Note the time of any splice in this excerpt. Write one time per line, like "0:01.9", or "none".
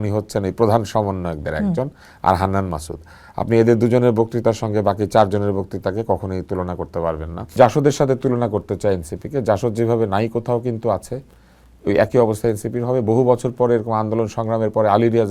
0:07.5